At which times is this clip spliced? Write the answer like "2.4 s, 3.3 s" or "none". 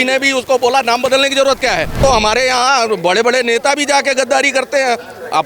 2.0 s

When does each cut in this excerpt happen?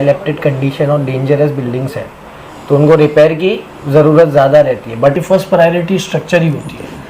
5.2 s

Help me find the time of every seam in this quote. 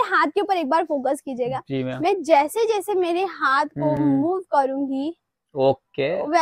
none

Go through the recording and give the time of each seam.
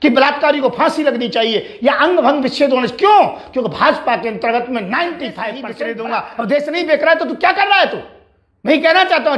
5.7 s

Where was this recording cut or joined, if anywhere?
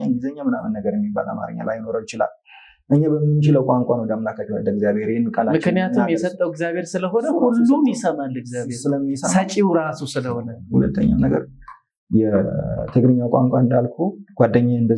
10.6 s

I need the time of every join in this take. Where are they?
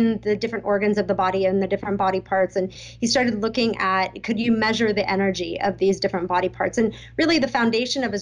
none

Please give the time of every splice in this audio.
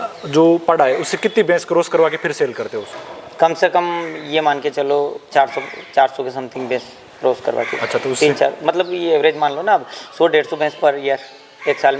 none

